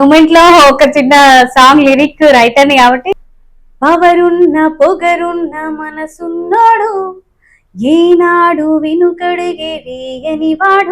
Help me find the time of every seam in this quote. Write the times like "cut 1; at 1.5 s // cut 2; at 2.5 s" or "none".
cut 1; at 3.1 s